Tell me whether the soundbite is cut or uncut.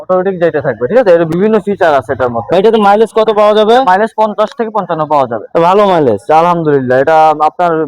uncut